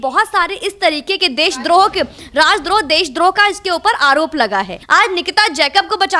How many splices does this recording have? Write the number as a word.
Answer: one